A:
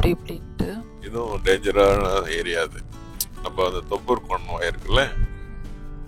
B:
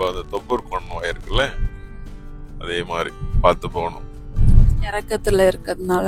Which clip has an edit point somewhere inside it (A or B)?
A